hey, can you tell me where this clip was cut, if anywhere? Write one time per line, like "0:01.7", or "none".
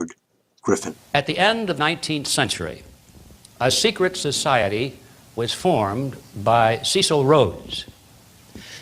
0:03.6